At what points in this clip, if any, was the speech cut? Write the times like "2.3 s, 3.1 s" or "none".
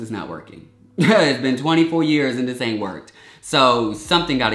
none